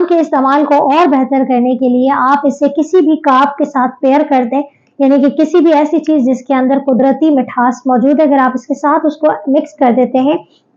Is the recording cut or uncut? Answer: uncut